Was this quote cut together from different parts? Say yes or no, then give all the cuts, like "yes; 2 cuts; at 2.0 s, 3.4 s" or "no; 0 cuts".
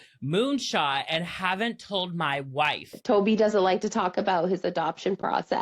yes; 1 cut; at 3.0 s